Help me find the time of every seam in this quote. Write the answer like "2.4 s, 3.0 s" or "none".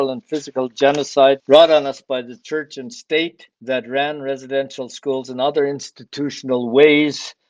1.4 s, 2.4 s, 3.5 s